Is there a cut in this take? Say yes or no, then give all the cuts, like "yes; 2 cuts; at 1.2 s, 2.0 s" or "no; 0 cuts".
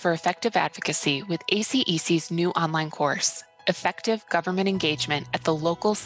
no; 0 cuts